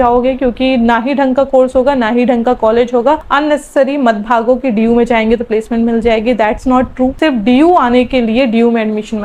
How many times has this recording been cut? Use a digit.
2